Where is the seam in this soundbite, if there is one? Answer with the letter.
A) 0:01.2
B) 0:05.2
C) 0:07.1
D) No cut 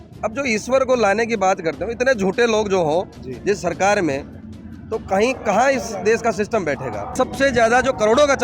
C